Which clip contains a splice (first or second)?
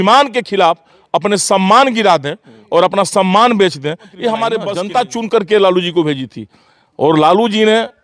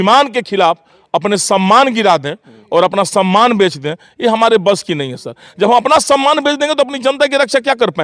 first